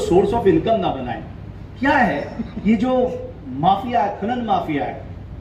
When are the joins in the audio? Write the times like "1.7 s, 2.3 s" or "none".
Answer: none